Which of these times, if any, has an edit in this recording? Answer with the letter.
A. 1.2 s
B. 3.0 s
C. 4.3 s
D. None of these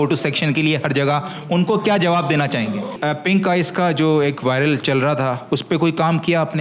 B